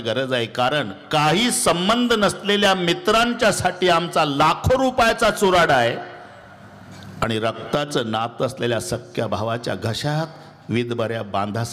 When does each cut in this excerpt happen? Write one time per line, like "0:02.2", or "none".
none

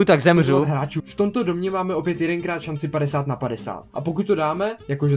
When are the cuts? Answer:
0:01.0

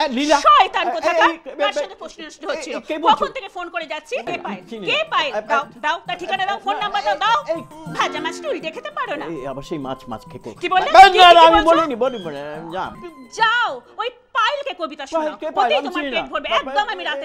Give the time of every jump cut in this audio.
0:04.3
0:07.7
0:13.0

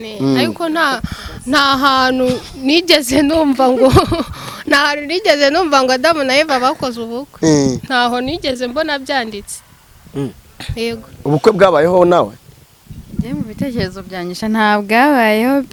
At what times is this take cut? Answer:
none

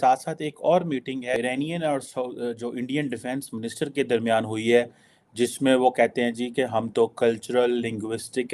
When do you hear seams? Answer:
0:01.4

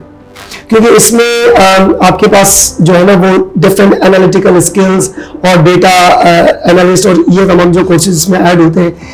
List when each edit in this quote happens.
none

